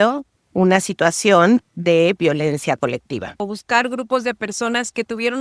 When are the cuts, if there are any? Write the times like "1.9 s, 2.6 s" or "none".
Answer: 3.3 s